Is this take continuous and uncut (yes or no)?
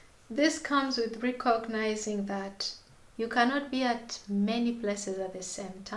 yes